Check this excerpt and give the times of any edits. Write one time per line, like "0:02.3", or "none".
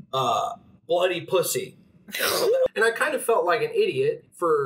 0:02.7